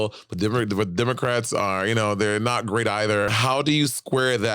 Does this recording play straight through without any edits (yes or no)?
no